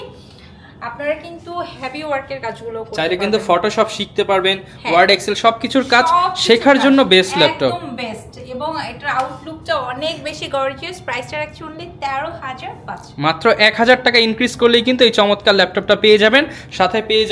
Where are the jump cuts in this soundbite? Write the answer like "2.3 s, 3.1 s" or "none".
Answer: none